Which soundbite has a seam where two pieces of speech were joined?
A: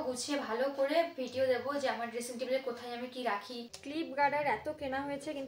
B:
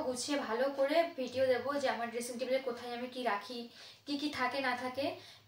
A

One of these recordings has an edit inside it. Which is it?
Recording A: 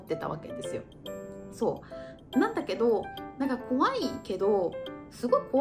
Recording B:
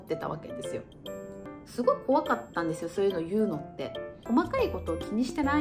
B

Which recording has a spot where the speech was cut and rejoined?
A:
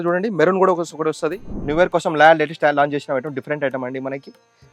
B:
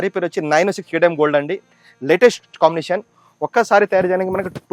A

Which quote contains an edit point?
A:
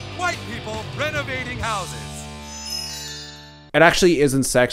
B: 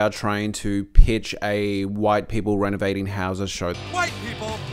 A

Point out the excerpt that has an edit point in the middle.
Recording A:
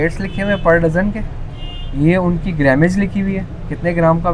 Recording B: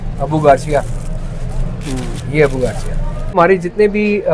B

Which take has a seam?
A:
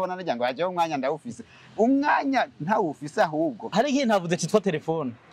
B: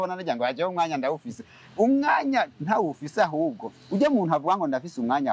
A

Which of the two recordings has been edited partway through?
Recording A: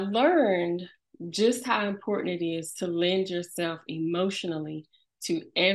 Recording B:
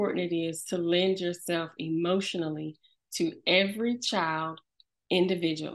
A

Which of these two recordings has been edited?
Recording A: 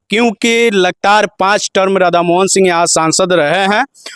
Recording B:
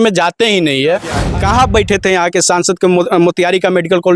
B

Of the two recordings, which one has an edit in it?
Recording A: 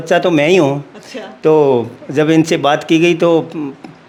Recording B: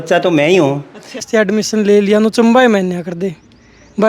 B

